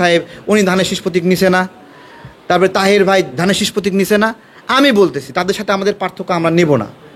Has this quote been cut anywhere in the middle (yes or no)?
no